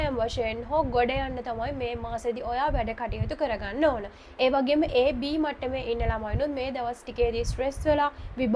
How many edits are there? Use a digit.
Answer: 0